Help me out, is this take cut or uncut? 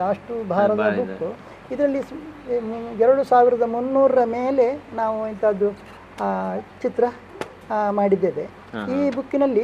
uncut